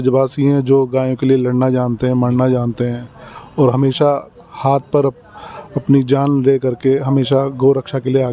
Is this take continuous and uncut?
yes; 0 cuts

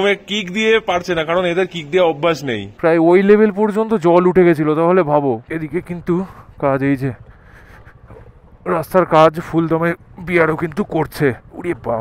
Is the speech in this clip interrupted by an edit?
yes; 2 cuts; at 2.7 s, 5.5 s

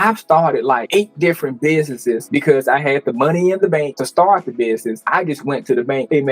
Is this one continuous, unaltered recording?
no; 1 cut; at 2.2 s

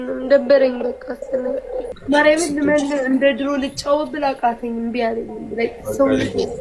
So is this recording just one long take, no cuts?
no; 1 cut; at 1.9 s

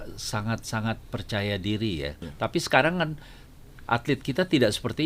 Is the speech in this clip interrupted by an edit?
yes; 1 cut; at 2.2 s

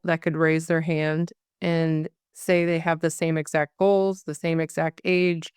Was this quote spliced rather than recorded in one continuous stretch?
no; 0 cuts

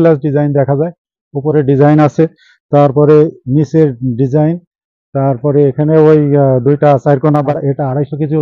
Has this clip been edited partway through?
yes; 1 cut; at 7.5 s

